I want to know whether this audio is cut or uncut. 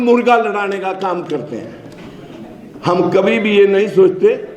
uncut